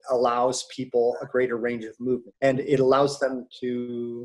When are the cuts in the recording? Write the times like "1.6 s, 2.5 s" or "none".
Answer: none